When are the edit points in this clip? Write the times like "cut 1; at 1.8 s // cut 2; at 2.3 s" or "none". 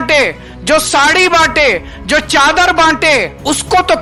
none